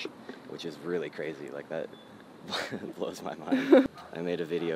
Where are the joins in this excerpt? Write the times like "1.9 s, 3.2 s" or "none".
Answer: 3.8 s